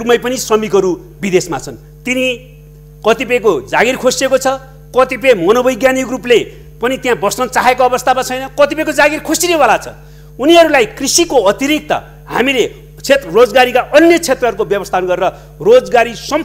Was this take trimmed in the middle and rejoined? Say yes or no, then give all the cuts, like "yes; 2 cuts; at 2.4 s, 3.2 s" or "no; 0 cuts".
no; 0 cuts